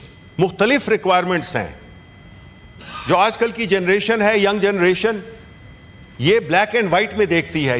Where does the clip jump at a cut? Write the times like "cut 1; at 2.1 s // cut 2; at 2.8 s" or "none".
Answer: none